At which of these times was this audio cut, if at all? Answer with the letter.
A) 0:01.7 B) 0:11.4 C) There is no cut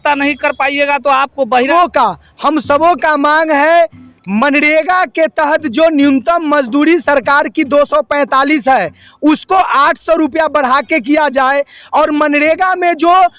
A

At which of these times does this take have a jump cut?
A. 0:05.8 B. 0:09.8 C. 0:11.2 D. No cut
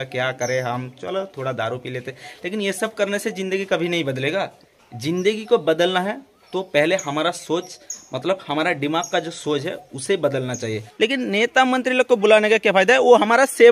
C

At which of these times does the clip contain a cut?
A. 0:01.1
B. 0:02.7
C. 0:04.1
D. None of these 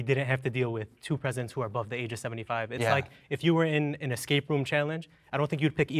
D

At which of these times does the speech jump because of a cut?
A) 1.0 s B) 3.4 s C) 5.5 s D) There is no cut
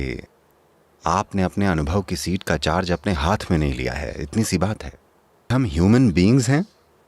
C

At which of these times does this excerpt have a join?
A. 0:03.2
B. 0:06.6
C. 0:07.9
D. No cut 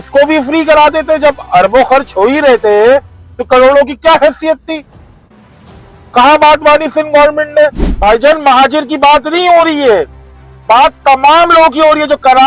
C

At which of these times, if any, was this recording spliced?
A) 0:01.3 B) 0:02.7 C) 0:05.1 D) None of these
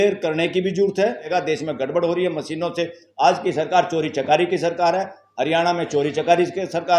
A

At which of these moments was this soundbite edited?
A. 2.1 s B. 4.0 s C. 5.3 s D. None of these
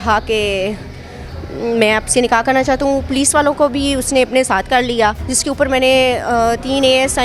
C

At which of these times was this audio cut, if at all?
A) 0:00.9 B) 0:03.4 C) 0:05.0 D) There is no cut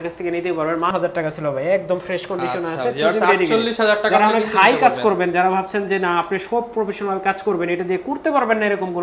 A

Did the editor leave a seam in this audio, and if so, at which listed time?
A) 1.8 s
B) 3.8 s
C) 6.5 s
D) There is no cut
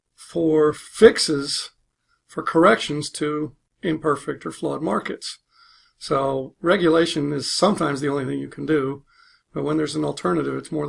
C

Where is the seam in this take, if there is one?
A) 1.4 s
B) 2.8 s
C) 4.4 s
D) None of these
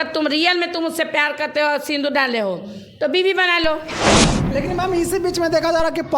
C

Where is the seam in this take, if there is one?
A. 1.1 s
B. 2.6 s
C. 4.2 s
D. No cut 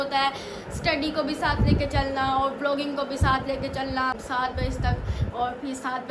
C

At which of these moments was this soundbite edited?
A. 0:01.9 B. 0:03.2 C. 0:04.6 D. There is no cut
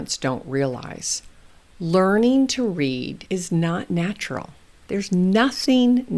B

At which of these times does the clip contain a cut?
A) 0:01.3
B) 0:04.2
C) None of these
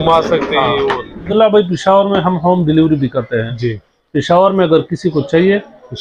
A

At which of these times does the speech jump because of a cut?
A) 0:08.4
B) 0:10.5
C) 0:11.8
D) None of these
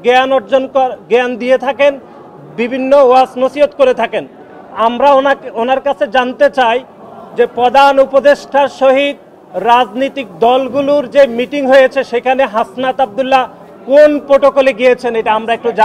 D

